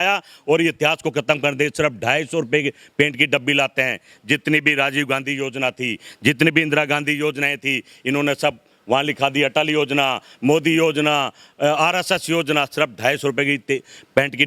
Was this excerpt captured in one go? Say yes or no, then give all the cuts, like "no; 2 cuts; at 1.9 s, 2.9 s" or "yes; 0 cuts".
yes; 0 cuts